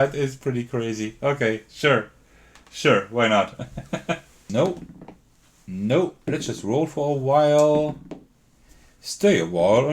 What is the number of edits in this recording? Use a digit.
1